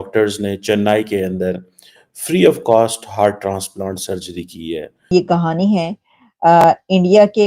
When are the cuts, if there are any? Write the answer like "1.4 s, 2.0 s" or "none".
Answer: 5.1 s